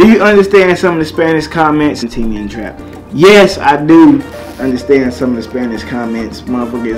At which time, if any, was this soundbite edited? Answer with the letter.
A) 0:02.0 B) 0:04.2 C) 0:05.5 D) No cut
A